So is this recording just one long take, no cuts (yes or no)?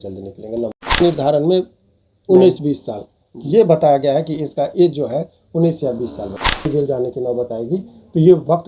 no